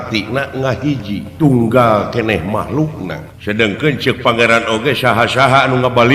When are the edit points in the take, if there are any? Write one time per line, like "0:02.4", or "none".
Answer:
0:01.3
0:03.3